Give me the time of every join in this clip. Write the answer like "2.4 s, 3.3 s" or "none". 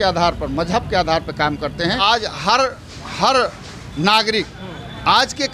2.0 s